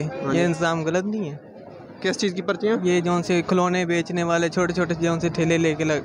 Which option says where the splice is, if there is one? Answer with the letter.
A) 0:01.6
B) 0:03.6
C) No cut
C